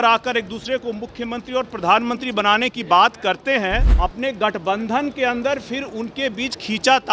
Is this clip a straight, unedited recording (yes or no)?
no